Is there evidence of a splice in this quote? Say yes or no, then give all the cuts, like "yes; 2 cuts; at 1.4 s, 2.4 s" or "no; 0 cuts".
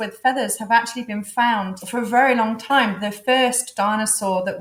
no; 0 cuts